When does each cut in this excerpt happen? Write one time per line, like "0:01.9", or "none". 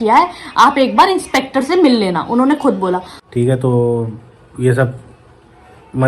0:03.1